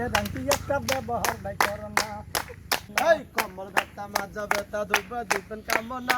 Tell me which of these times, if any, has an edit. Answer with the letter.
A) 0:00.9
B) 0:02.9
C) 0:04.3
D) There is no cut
B